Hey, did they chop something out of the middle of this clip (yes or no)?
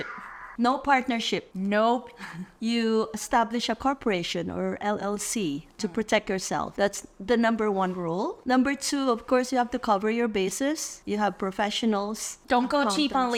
no